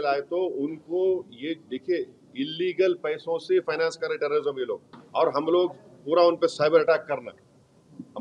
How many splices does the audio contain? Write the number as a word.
one